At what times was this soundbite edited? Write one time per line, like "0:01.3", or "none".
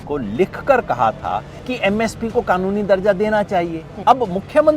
0:01.6
0:03.8